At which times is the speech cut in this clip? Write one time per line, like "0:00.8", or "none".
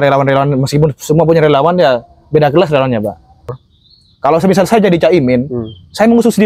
0:03.6